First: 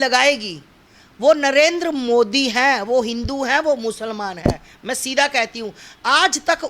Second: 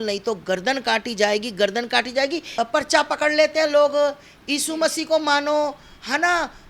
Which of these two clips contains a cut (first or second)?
second